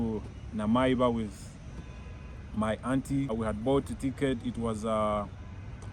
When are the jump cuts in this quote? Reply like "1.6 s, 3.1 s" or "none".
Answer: 3.3 s